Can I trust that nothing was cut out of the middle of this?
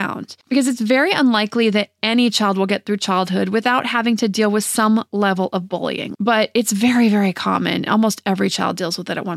no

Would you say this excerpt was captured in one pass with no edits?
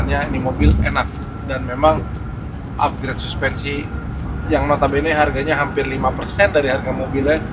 yes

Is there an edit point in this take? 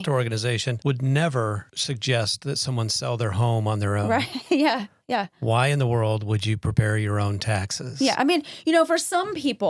yes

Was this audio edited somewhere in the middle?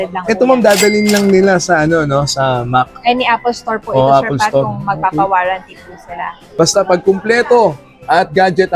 yes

